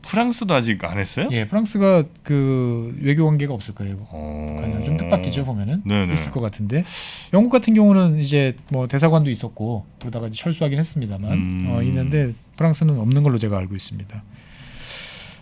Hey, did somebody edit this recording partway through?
no; 0 cuts

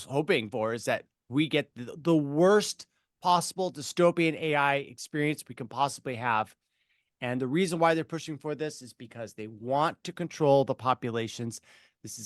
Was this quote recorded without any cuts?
yes; 0 cuts

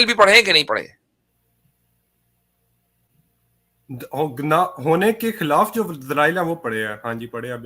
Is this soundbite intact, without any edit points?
yes; 0 cuts

